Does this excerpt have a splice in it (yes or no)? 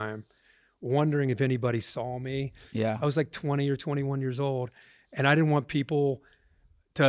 yes